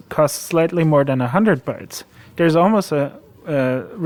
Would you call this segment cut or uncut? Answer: uncut